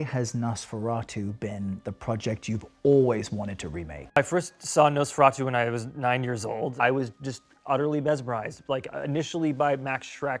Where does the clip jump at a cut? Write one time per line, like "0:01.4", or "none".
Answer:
0:04.2
0:06.7